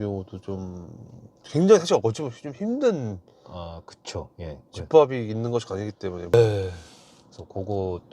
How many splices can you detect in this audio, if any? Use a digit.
1